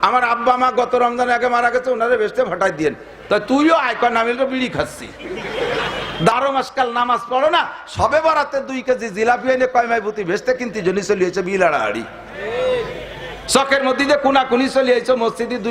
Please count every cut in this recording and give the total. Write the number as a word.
one